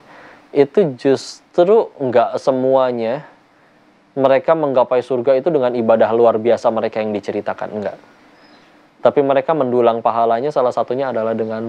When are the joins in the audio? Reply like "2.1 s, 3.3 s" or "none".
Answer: none